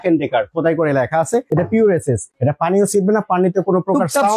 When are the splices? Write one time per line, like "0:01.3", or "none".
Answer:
0:01.5
0:02.3